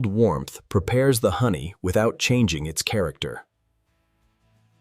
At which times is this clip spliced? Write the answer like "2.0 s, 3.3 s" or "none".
none